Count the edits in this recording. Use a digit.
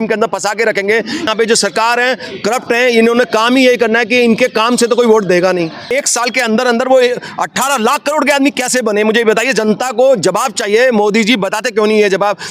2